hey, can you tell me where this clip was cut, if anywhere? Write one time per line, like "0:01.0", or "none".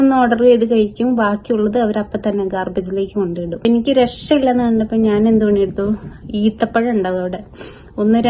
0:03.7